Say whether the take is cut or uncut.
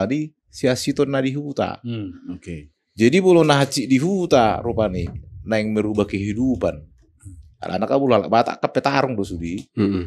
uncut